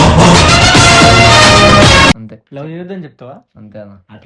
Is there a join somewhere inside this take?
yes; 1 cut; at 2.1 s

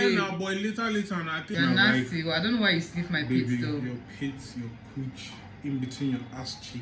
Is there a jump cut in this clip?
yes; 1 cut; at 1.5 s

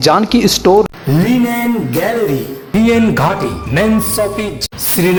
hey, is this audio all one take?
yes; 0 cuts

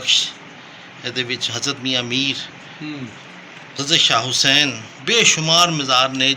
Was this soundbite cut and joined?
no; 0 cuts

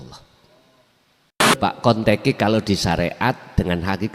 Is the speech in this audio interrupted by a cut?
yes; 1 cut; at 1.6 s

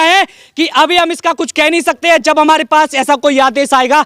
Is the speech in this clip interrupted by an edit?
no; 0 cuts

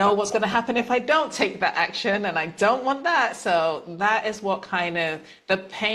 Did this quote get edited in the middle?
no; 0 cuts

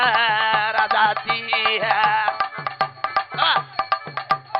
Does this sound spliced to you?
no; 0 cuts

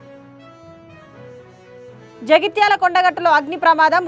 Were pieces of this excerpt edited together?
yes; 1 cut; at 1.2 s

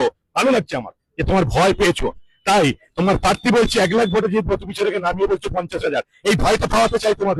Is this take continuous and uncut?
yes; 0 cuts

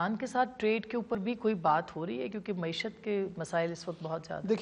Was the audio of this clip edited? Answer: no; 0 cuts

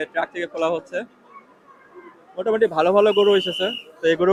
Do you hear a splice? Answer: no; 0 cuts

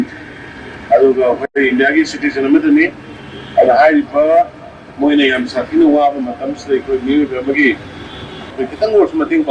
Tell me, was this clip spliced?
no; 0 cuts

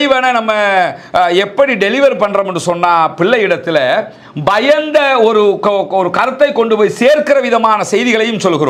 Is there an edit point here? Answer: no; 0 cuts

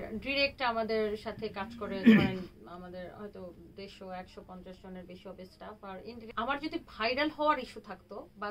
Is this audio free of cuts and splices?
no; 1 cut; at 6.3 s

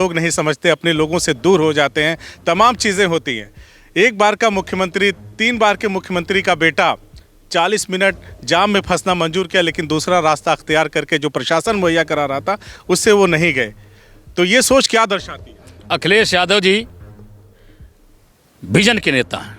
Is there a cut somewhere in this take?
no; 0 cuts

